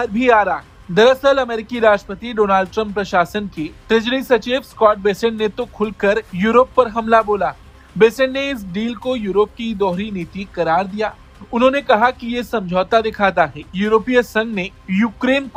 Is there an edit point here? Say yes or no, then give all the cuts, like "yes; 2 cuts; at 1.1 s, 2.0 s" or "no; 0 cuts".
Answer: no; 0 cuts